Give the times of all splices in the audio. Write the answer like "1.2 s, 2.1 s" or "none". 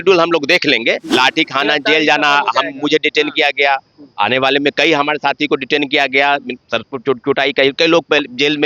1.1 s